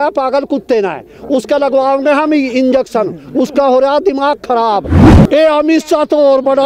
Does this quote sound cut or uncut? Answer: cut